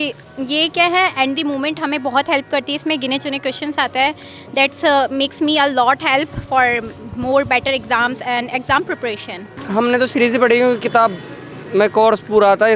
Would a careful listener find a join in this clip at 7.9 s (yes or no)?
no